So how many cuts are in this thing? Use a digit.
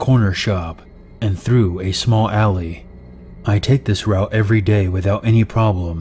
1